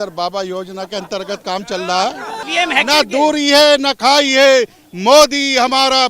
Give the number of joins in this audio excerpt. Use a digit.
1